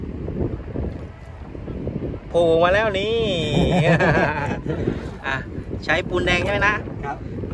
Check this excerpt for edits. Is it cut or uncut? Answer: uncut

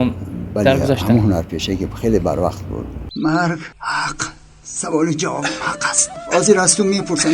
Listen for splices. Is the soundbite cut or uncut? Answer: cut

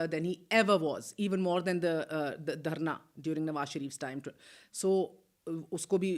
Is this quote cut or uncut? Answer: uncut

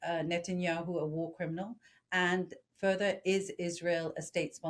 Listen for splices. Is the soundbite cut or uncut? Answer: uncut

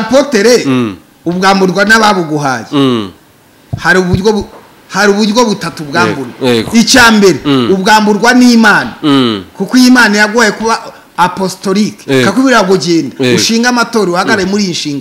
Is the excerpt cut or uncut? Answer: uncut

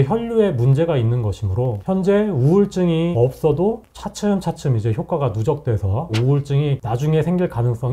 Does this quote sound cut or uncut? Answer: uncut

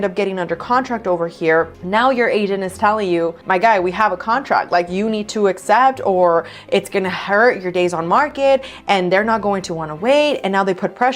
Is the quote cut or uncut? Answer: uncut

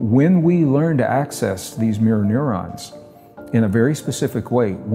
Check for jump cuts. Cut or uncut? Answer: uncut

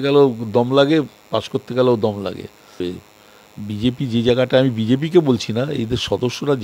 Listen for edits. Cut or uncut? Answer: cut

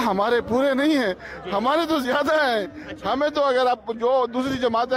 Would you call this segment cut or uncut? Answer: uncut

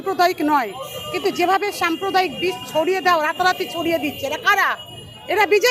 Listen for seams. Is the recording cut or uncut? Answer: uncut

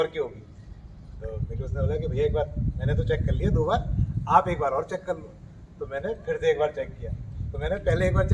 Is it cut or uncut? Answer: uncut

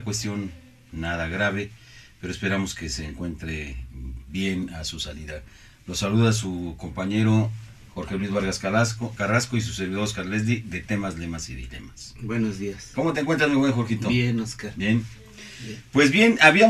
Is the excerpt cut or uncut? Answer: uncut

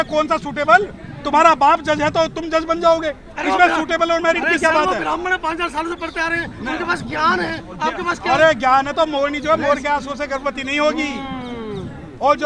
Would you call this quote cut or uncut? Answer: uncut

